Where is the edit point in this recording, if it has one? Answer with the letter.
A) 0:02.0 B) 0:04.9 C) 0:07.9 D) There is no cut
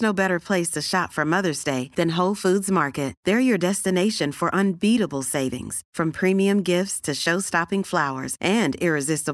D